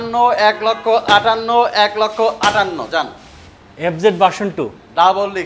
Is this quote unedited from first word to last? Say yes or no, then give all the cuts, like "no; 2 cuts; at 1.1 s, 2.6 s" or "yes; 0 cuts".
yes; 0 cuts